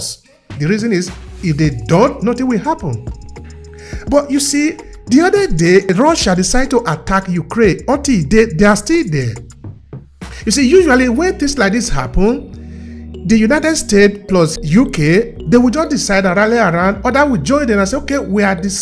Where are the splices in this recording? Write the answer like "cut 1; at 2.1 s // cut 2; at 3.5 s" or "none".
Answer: cut 1; at 5.9 s // cut 2; at 14.6 s